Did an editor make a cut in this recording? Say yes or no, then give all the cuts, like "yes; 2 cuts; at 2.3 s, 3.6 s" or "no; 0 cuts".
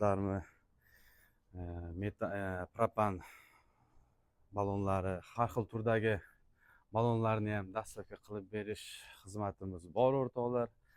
no; 0 cuts